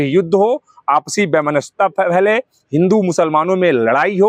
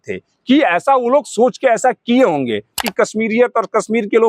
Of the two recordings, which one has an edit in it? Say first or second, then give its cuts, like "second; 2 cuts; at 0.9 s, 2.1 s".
second; 1 cut; at 2.8 s